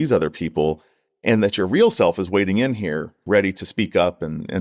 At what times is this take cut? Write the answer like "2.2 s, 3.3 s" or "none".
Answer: 3.2 s